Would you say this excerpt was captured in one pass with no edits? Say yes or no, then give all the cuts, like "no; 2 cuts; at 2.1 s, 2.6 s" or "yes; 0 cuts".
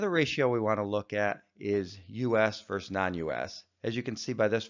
yes; 0 cuts